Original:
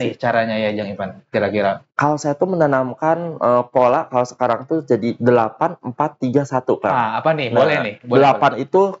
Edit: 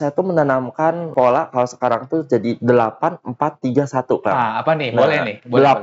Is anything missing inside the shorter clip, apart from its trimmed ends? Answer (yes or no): yes